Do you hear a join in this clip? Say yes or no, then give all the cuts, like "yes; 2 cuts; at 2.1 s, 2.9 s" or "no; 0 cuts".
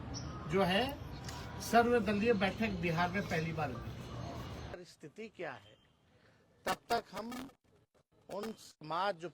yes; 1 cut; at 4.7 s